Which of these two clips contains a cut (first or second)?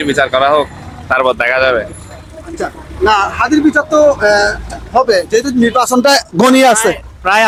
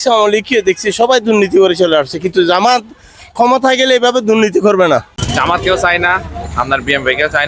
second